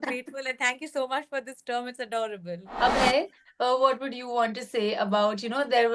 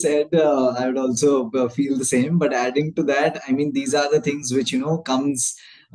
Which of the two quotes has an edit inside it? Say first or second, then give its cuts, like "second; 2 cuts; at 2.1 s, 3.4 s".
first; 1 cut; at 2.7 s